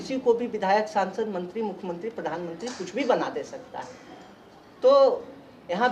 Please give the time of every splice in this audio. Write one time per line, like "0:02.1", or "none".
none